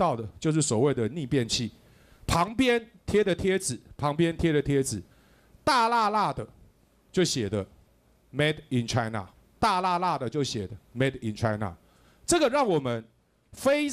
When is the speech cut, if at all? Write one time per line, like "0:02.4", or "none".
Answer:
none